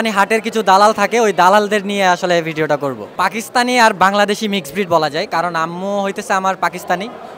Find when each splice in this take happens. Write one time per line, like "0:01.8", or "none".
0:03.0